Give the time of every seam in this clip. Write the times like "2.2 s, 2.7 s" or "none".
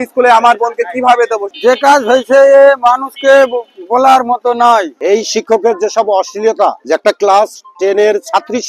1.5 s, 5.0 s, 6.8 s